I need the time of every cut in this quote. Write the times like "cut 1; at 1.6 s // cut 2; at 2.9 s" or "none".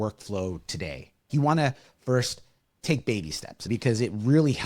cut 1; at 1.3 s // cut 2; at 3.7 s